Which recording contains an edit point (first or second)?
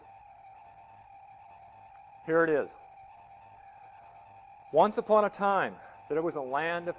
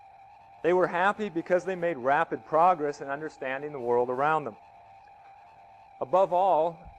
first